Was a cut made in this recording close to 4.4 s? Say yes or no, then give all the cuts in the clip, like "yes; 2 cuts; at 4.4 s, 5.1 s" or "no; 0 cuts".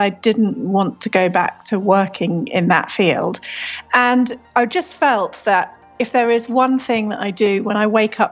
yes; 1 cut; at 4.4 s